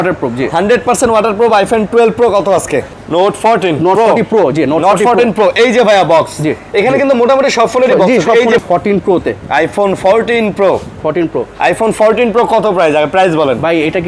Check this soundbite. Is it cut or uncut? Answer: cut